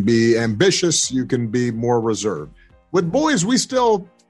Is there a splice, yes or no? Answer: yes